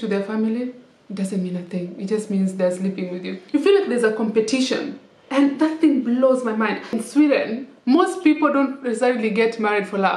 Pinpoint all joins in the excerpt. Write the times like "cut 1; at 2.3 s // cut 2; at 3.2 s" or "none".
cut 1; at 3.4 s // cut 2; at 7.0 s

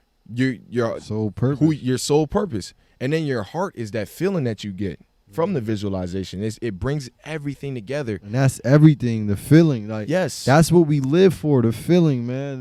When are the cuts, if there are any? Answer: none

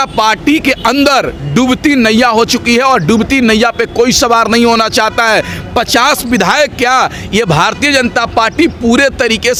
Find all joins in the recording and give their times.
none

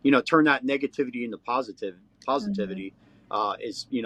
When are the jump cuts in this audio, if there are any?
none

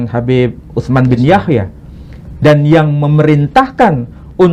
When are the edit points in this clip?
none

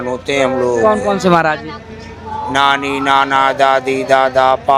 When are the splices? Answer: none

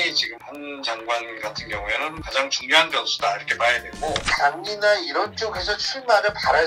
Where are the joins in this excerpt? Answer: cut 1; at 4.3 s

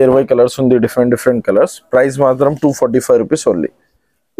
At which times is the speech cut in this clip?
none

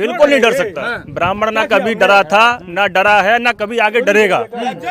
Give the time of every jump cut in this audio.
none

